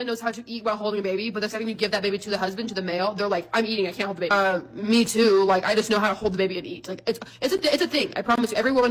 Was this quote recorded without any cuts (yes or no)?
yes